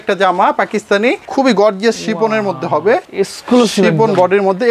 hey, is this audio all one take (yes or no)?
no